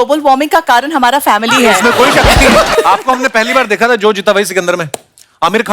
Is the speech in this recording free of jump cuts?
no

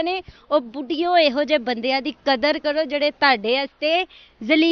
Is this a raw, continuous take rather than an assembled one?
yes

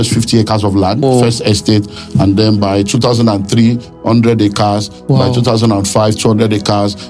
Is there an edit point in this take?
yes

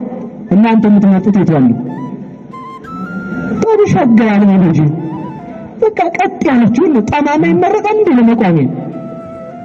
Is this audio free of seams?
yes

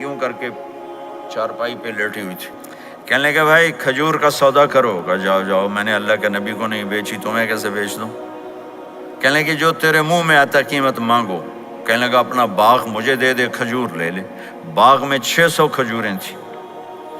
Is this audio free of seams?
no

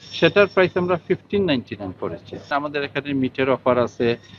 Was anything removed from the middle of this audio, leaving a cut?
yes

